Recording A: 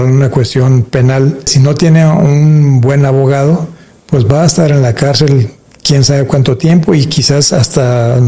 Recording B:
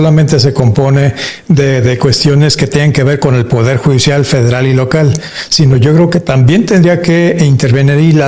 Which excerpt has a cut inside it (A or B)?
A